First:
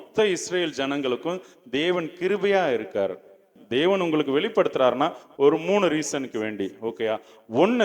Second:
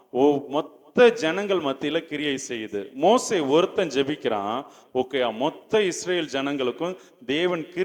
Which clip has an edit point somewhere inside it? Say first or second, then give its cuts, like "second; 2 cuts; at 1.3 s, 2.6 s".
first; 1 cut; at 3.6 s